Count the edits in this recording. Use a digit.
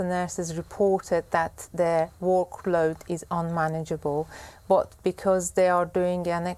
0